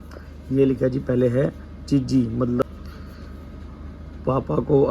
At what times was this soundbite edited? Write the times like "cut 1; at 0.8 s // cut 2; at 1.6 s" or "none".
cut 1; at 2.6 s